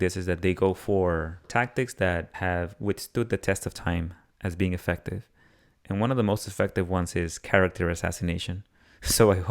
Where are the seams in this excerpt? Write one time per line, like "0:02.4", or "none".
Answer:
0:01.5
0:02.3